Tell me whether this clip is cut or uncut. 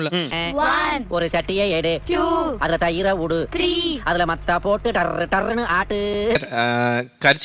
cut